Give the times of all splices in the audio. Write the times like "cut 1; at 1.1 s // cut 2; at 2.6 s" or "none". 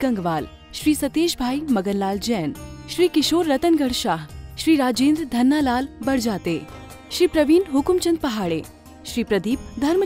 none